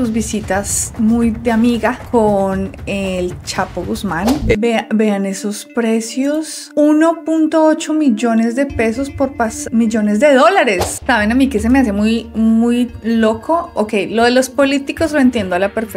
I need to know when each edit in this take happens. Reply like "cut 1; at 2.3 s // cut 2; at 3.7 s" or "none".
cut 1; at 4.4 s // cut 2; at 10.9 s